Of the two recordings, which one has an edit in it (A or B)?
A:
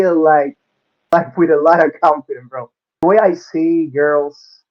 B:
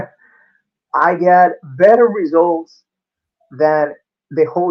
A